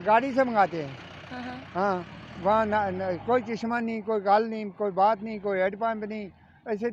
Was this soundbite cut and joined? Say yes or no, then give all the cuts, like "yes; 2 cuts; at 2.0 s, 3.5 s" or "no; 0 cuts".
no; 0 cuts